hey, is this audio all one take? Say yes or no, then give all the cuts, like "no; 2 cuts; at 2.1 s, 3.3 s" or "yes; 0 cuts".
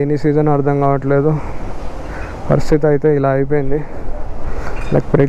yes; 0 cuts